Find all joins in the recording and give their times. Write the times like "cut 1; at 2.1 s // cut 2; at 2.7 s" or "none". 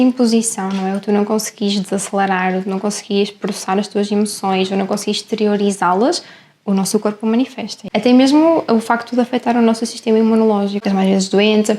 cut 1; at 7.8 s // cut 2; at 10.8 s